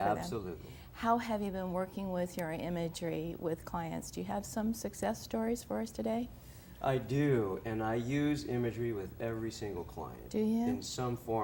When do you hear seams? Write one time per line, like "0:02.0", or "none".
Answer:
none